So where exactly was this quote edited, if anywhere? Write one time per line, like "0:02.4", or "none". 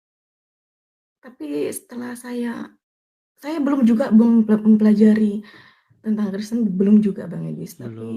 none